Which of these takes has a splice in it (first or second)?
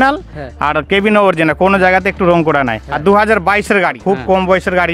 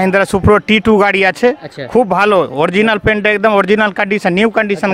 first